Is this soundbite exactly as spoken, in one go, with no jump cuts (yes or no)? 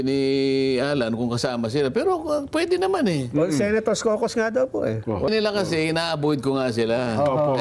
no